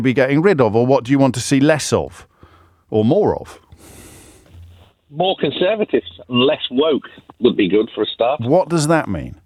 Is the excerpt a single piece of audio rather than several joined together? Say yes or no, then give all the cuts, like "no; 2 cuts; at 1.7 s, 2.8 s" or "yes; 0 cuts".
yes; 0 cuts